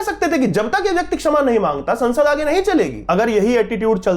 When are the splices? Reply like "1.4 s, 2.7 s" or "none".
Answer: 3.0 s